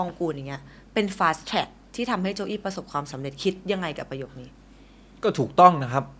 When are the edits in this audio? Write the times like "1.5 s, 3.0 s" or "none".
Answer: none